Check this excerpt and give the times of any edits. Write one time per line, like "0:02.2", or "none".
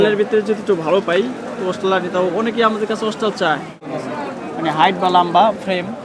0:03.8